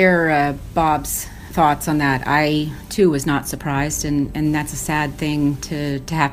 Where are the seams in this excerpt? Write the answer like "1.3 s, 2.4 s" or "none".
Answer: 1.4 s